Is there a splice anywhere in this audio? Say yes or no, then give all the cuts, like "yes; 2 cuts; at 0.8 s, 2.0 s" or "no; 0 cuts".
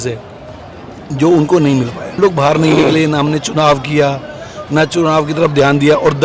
yes; 1 cut; at 2.2 s